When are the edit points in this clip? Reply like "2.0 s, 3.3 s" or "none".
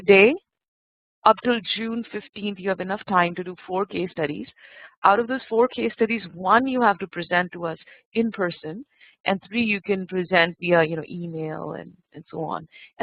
3.0 s